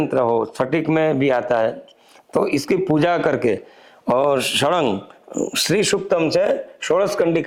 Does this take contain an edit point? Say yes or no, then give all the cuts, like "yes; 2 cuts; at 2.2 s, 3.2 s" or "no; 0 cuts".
no; 0 cuts